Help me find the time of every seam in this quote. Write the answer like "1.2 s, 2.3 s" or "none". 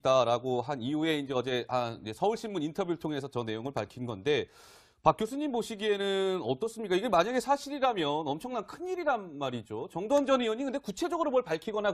3.6 s